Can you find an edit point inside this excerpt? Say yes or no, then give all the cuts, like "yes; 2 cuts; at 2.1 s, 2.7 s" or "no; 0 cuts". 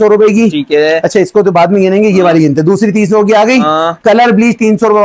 no; 0 cuts